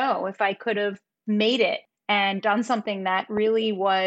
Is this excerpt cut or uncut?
cut